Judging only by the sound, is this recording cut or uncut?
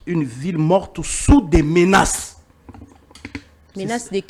uncut